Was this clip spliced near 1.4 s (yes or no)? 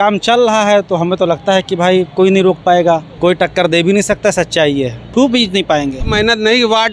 no